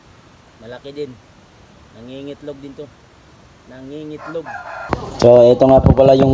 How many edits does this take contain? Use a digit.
1